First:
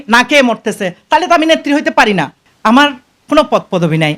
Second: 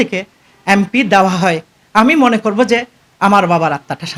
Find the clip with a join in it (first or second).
first